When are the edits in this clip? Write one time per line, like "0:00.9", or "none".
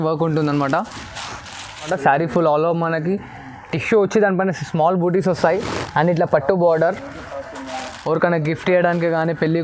0:01.9